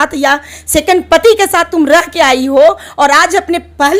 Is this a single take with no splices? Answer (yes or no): yes